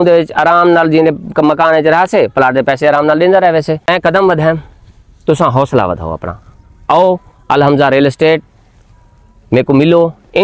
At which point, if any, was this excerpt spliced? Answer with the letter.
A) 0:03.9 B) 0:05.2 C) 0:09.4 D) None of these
A